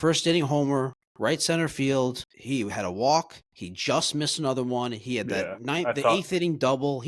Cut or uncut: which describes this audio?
cut